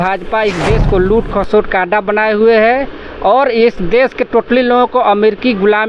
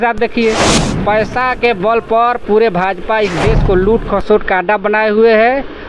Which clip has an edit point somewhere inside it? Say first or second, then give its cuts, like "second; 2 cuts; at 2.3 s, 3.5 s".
second; 1 cut; at 1.0 s